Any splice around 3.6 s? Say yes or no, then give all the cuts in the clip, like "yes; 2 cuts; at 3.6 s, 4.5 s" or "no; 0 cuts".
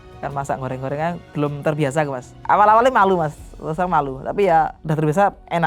no; 2 cuts; at 2.3 s, 4.8 s